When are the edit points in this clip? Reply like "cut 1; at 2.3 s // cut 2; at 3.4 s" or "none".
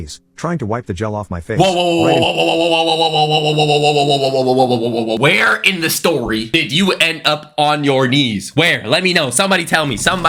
none